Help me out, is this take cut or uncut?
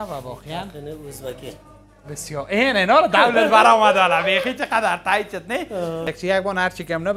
cut